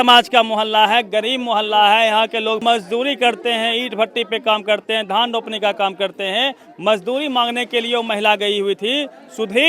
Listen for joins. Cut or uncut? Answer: cut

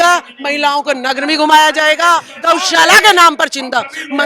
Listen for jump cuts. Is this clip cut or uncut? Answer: cut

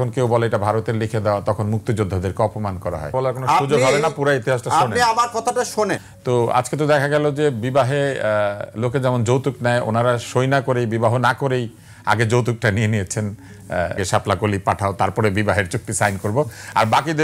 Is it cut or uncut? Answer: cut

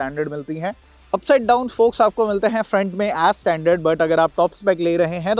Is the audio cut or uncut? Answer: cut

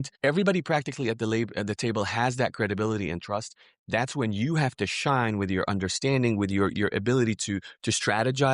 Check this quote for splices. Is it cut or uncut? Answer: uncut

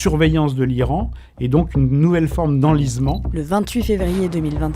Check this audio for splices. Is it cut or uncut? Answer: cut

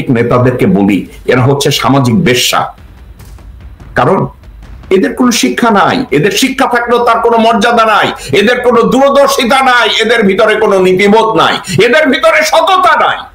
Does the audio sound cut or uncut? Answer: uncut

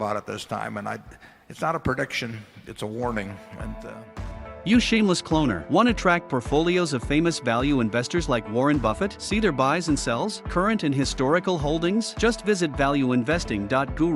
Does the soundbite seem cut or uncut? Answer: uncut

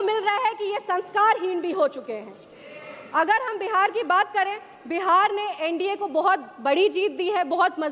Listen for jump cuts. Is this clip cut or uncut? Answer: uncut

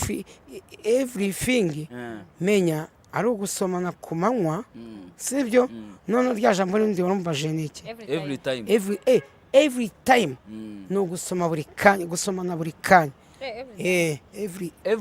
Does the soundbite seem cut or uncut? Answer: uncut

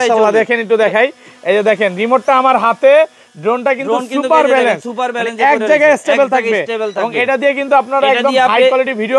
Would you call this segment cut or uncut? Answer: uncut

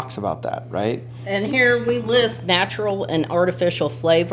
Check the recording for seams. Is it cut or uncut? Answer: uncut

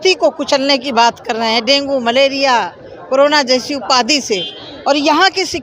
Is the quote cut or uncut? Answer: uncut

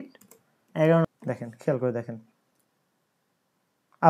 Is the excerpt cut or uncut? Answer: cut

